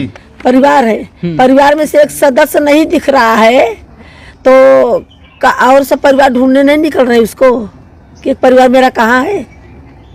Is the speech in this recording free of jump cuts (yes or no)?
yes